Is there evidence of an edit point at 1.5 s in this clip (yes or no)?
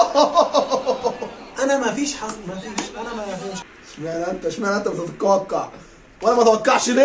no